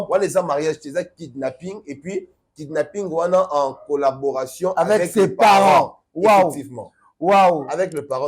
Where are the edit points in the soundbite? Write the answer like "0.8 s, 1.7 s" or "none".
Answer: none